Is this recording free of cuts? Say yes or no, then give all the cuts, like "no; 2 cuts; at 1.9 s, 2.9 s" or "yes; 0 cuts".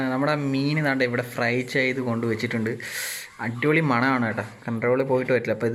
yes; 0 cuts